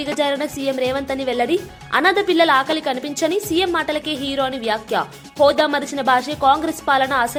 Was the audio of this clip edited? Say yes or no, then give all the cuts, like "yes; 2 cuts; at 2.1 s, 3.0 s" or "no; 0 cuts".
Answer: no; 0 cuts